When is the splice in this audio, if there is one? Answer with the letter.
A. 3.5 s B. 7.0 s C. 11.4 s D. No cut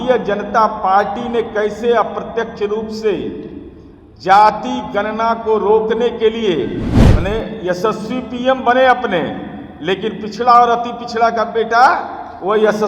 B